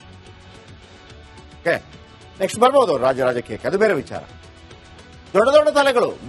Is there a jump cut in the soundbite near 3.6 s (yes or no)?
no